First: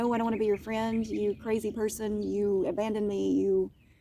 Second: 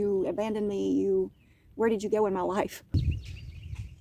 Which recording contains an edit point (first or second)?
second